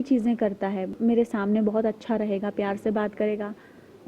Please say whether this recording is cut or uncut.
cut